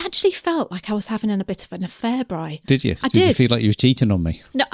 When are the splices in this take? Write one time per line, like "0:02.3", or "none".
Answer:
none